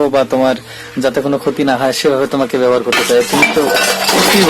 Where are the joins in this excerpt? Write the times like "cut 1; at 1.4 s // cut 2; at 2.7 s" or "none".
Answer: none